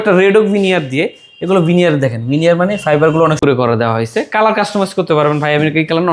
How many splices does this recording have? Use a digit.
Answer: 1